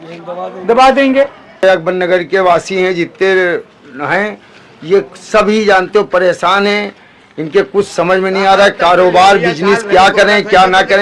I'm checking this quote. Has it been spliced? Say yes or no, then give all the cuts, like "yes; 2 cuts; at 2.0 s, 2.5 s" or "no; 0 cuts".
yes; 1 cut; at 1.6 s